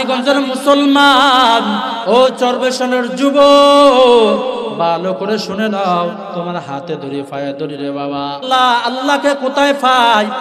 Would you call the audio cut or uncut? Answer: cut